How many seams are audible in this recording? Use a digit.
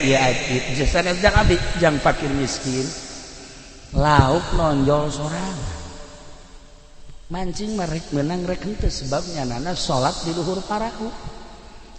0